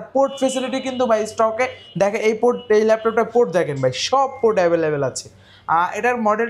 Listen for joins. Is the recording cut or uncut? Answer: uncut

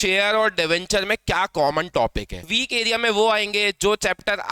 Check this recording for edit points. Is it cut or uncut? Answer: cut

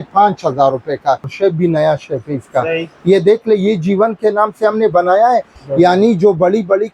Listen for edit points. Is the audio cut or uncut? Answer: cut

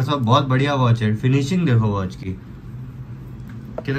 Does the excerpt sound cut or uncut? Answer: uncut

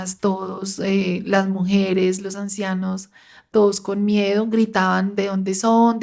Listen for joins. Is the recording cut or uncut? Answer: uncut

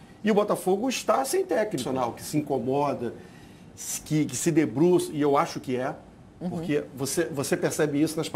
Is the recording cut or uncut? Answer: cut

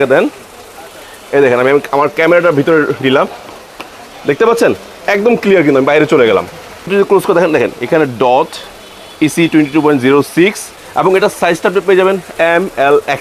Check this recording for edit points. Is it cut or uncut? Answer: cut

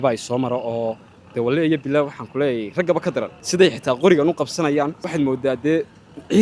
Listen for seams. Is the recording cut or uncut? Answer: cut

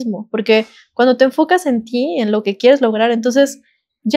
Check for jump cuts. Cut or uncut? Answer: uncut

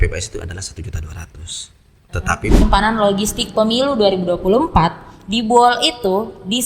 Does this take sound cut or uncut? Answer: cut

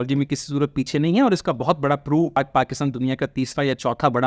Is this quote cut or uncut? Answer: cut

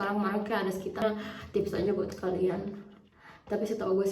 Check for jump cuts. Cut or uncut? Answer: cut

